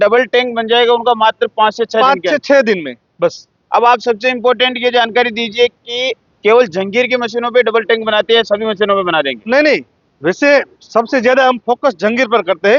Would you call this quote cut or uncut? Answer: uncut